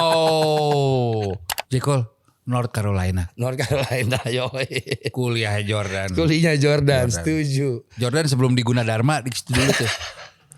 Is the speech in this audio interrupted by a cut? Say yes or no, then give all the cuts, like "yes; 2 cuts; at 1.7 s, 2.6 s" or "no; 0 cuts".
yes; 1 cut; at 1.5 s